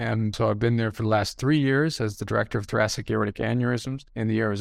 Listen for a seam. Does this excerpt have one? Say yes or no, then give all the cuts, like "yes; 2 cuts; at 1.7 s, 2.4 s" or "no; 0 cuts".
no; 0 cuts